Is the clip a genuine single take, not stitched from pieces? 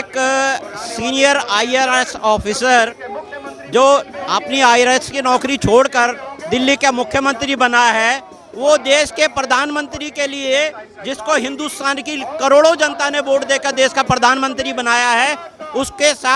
yes; 0 cuts

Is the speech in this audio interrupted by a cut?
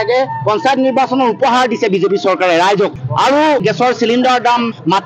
yes; 1 cut; at 3.6 s

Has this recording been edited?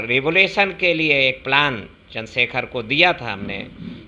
no; 0 cuts

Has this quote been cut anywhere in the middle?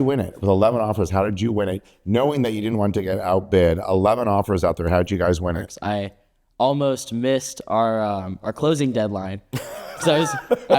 yes; 1 cut; at 5.7 s

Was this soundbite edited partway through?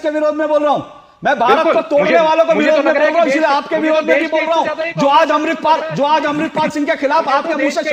no; 0 cuts

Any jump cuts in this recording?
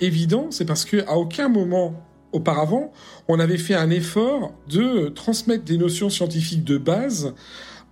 no; 0 cuts

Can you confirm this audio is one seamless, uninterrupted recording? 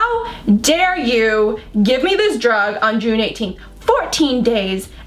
yes; 0 cuts

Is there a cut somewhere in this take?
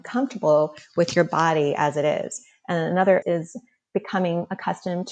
yes; 1 cut; at 3.2 s

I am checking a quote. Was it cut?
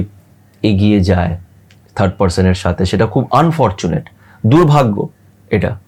no; 0 cuts

